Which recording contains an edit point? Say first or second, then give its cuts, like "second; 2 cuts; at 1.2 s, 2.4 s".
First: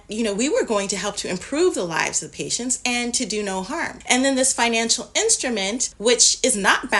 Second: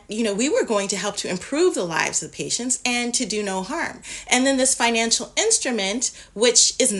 first; 2 cuts; at 3.9 s, 5.9 s